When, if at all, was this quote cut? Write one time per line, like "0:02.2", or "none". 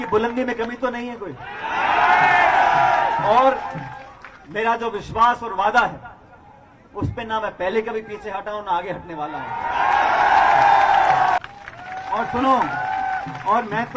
0:11.4